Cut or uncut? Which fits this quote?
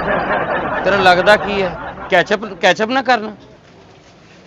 cut